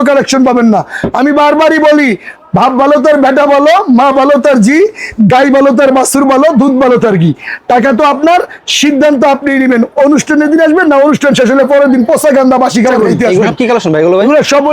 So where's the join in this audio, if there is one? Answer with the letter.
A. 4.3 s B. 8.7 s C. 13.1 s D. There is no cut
C